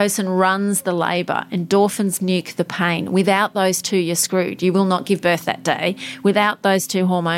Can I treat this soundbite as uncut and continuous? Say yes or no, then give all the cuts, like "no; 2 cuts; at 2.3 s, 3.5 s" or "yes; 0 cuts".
no; 1 cut; at 5.0 s